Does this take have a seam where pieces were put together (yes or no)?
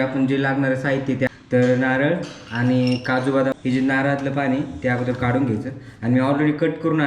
yes